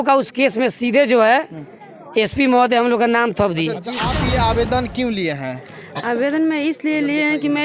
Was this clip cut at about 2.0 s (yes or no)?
no